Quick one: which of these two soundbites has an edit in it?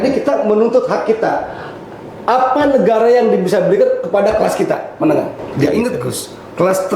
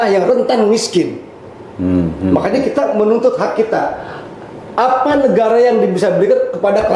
first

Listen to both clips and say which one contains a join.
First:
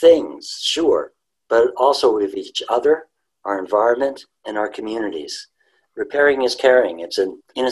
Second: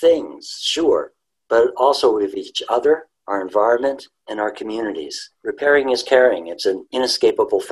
second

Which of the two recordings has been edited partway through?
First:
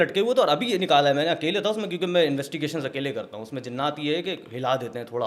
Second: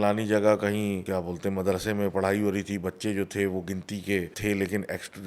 second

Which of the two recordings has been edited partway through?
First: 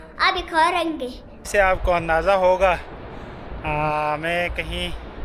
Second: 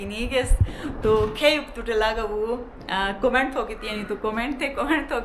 first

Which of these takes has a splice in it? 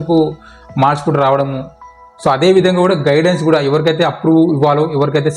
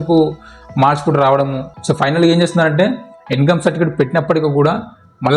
second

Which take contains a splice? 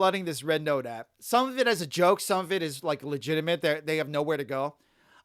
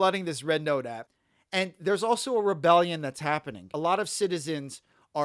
second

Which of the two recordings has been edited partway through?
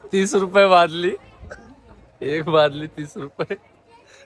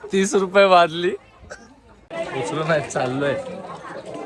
second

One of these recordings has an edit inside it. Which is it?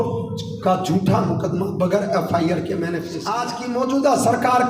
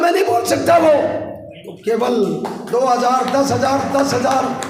first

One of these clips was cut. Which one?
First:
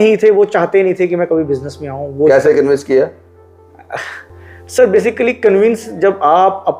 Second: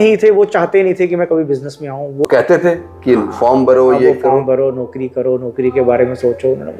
second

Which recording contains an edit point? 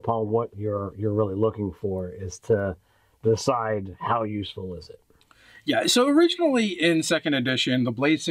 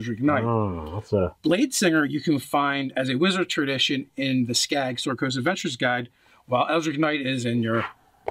second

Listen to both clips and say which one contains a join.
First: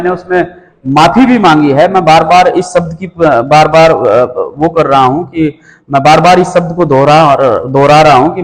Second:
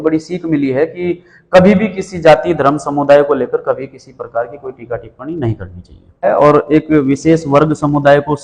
second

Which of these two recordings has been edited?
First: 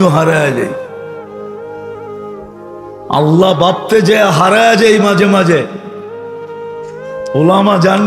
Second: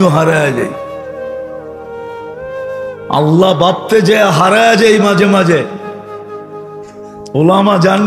first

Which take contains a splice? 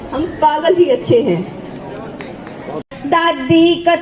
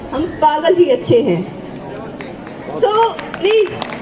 first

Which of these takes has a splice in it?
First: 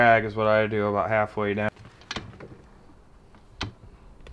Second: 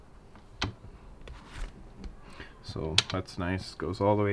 first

